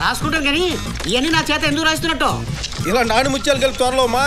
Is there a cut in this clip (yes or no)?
no